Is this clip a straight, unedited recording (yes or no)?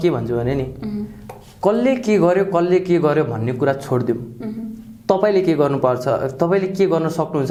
yes